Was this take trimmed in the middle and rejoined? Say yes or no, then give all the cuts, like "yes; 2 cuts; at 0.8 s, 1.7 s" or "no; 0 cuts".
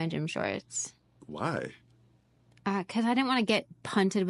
no; 0 cuts